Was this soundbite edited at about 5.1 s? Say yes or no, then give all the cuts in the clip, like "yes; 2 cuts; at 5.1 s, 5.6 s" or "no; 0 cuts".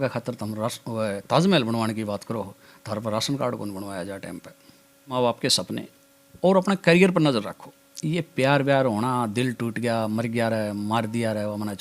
yes; 1 cut; at 5.1 s